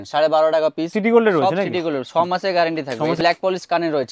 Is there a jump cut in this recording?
yes; 2 cuts; at 0.9 s, 3.2 s

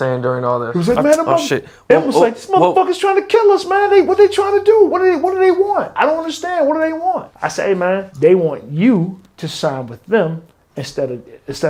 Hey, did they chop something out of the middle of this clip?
no; 0 cuts

